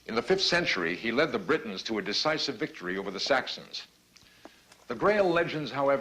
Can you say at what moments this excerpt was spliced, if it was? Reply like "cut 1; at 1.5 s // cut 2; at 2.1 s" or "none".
cut 1; at 2.9 s